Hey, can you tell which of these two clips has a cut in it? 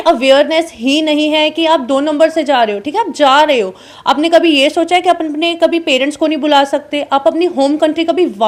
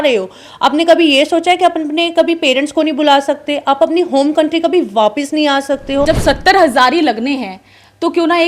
second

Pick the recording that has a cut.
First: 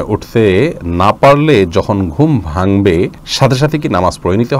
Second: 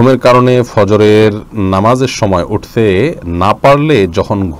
first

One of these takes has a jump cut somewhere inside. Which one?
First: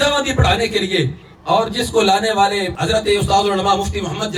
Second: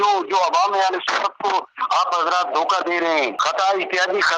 second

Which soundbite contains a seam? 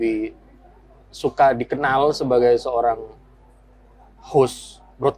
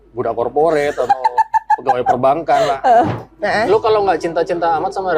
second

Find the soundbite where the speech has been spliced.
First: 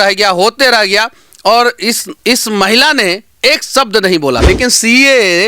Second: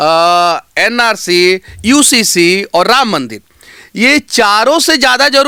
first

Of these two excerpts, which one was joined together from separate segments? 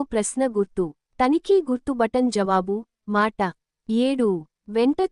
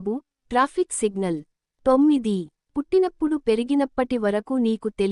first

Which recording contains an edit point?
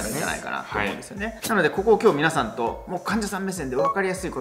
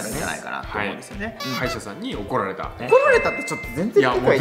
second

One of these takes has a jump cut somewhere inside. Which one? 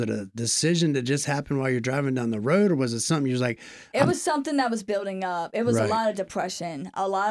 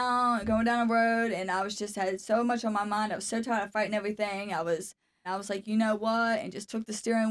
second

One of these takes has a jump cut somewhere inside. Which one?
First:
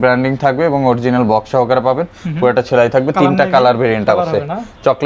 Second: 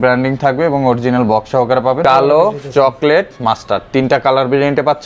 second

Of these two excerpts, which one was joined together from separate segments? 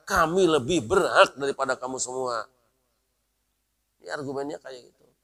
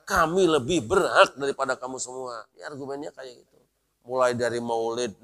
second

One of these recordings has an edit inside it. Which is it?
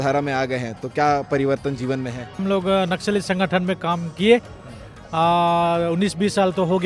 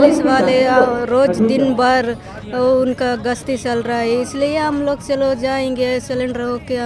first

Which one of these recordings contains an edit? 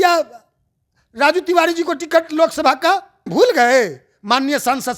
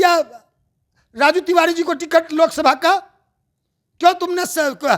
first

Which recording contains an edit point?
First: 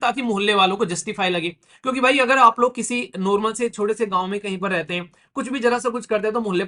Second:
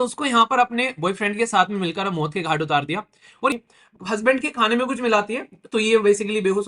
second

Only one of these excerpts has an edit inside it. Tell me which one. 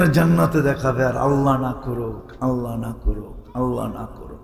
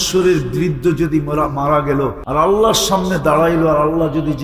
second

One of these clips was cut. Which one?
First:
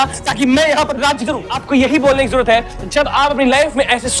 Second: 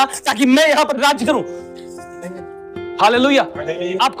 first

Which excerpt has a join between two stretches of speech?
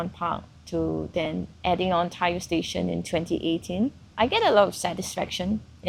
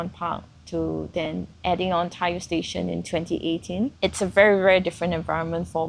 second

